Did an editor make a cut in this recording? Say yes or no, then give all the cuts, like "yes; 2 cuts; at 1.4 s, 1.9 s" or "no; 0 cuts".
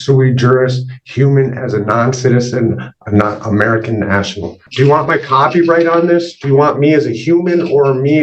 yes; 1 cut; at 4.7 s